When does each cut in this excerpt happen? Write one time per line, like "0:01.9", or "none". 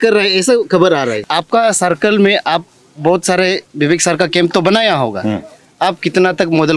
0:01.2